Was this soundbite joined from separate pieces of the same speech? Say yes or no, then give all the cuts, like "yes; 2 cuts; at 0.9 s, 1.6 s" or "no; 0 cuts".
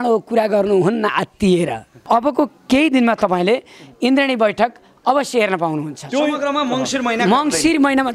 yes; 1 cut; at 2.0 s